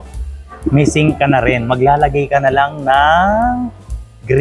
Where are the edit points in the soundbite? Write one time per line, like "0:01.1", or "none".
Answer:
none